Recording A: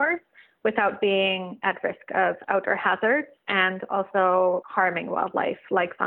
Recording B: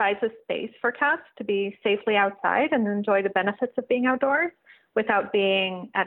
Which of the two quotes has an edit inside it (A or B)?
A